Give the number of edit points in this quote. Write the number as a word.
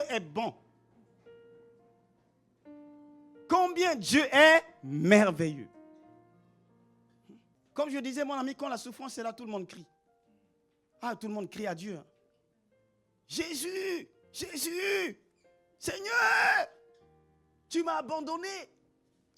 one